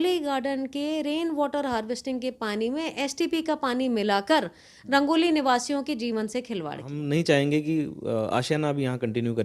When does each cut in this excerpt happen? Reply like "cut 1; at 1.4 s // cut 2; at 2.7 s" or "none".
cut 1; at 6.9 s